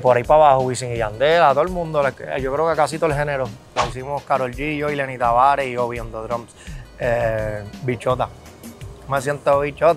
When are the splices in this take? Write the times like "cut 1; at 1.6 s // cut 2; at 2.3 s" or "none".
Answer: cut 1; at 3.7 s